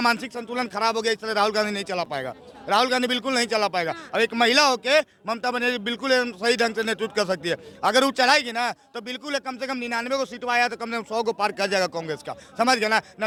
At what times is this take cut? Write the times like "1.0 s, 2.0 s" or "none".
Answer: none